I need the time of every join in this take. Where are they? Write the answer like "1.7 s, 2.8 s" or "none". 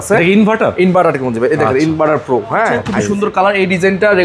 2.9 s